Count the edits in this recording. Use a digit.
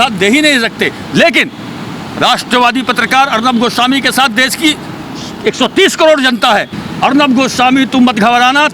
1